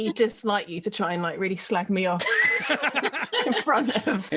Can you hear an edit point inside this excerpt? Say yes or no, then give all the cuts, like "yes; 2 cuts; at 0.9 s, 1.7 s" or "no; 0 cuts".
no; 0 cuts